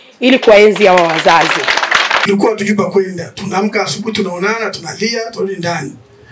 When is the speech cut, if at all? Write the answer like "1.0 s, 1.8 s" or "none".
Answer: 2.2 s

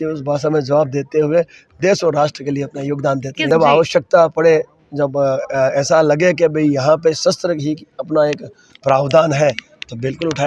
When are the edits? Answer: 3.4 s

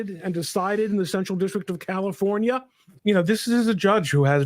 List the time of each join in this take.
3.0 s

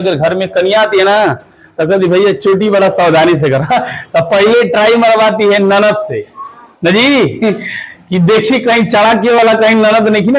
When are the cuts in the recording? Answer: none

